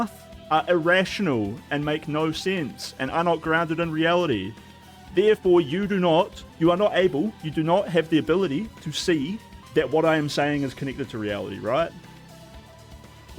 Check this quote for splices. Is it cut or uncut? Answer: uncut